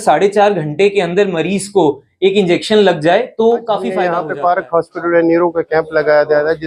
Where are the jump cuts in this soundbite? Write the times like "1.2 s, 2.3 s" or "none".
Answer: 3.9 s